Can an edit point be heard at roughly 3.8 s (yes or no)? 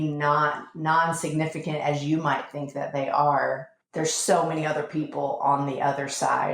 yes